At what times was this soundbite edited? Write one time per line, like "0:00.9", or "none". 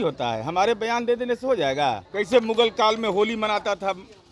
0:02.1